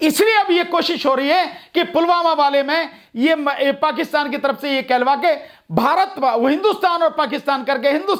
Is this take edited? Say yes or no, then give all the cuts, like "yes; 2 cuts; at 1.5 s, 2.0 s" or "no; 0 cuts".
no; 0 cuts